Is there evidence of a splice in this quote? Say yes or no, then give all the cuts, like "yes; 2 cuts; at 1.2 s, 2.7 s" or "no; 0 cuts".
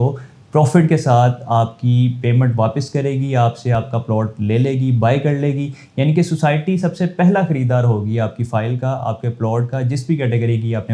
no; 0 cuts